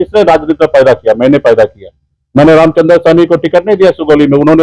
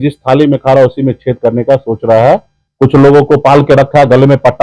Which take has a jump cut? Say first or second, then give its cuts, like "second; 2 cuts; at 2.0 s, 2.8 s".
second; 1 cut; at 2.6 s